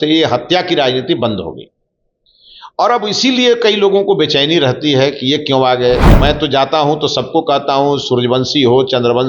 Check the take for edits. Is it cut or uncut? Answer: cut